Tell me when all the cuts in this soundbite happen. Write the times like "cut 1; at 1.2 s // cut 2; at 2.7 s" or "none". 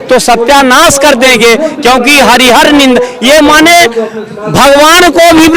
none